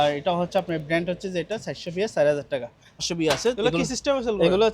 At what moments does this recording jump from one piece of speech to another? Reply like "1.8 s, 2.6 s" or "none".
3.1 s